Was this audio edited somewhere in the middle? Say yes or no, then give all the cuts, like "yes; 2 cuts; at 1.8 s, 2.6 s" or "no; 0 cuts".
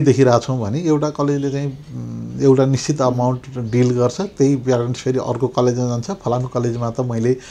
no; 0 cuts